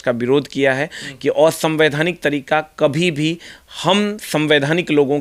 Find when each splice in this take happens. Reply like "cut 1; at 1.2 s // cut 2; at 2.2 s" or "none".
none